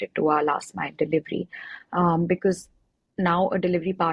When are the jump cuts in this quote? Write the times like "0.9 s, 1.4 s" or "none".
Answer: none